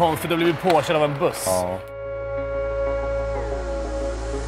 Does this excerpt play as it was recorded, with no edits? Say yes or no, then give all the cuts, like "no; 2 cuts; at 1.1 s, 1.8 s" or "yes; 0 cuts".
yes; 0 cuts